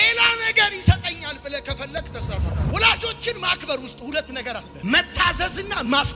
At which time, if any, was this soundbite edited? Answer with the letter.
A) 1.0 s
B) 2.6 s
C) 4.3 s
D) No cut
B